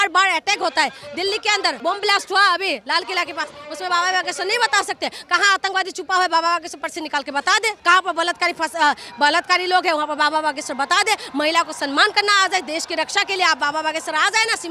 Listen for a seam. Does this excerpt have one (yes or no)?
yes